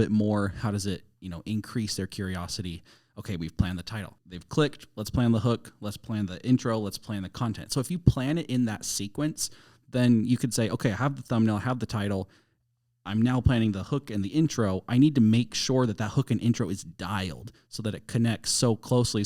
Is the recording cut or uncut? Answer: uncut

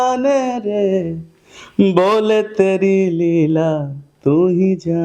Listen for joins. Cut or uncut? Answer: uncut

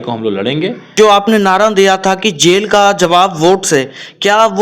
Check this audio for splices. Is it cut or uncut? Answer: cut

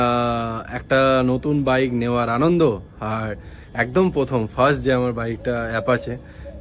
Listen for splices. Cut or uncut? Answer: uncut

